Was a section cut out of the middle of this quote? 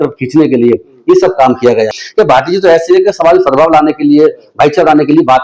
yes; 1 cut; at 1.9 s

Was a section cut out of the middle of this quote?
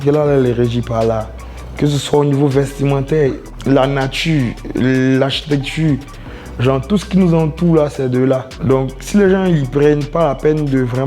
yes; 2 cuts; at 3.5 s, 8.5 s

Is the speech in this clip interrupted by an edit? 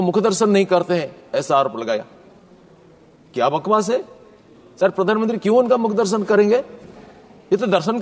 no; 0 cuts

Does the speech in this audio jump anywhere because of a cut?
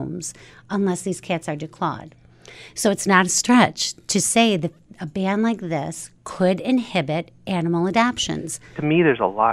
yes; 1 cut; at 8.6 s

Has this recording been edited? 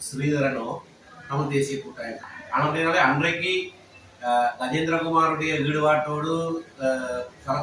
yes; 1 cut; at 2.2 s

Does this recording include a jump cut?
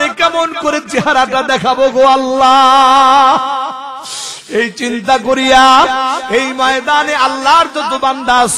no; 0 cuts

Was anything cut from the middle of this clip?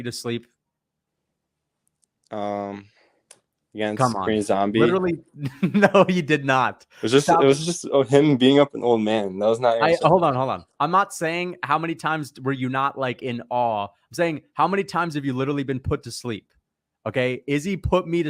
no; 0 cuts

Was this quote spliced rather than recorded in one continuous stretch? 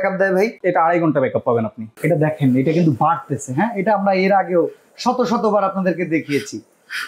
yes; 1 cut; at 1.9 s

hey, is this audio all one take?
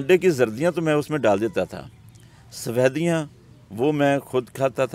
yes; 0 cuts

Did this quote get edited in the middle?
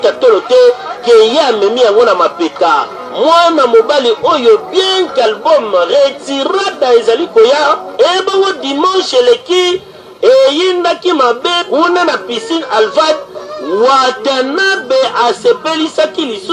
yes; 1 cut; at 2.8 s

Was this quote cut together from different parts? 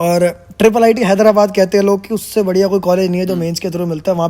no; 0 cuts

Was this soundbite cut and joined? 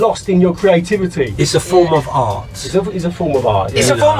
no; 0 cuts

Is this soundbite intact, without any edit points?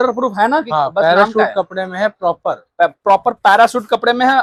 yes; 0 cuts

